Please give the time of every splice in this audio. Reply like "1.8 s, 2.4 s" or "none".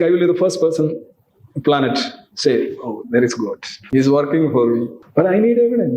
3.7 s, 5.0 s